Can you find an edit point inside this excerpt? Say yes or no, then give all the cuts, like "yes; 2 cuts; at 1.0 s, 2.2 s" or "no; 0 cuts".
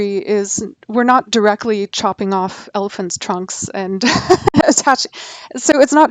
no; 0 cuts